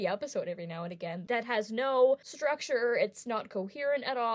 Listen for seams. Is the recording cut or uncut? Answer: cut